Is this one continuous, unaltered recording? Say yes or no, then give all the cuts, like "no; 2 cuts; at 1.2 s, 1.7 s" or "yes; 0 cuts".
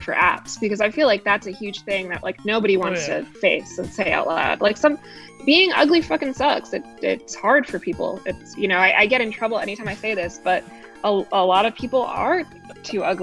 yes; 0 cuts